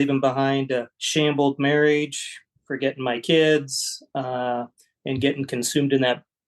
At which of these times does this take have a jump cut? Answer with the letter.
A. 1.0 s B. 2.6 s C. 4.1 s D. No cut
A